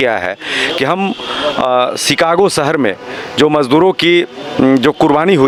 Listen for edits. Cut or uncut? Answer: uncut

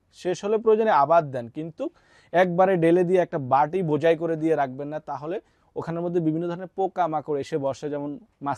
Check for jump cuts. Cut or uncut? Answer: uncut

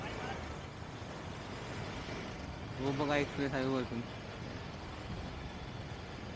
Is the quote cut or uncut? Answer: uncut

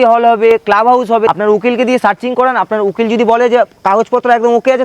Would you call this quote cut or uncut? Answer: cut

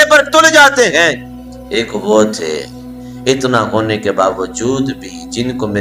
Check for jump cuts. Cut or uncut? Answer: uncut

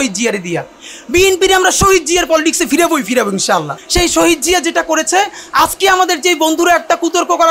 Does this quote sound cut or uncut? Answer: cut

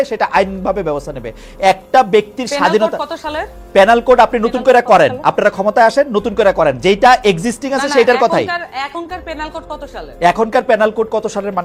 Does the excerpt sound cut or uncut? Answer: uncut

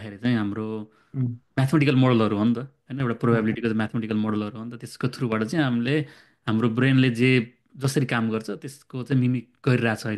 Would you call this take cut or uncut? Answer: uncut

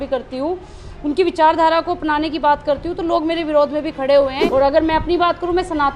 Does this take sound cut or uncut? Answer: cut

